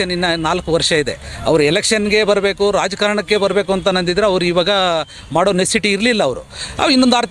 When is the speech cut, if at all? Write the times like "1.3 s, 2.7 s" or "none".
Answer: none